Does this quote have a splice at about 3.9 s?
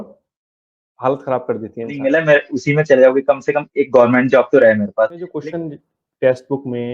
no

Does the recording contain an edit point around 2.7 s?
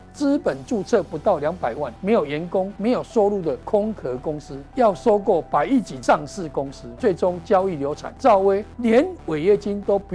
yes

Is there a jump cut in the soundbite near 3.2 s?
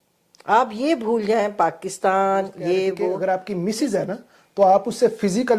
yes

